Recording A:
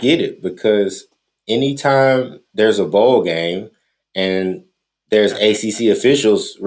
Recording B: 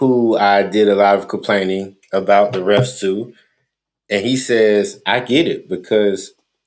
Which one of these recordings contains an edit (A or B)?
A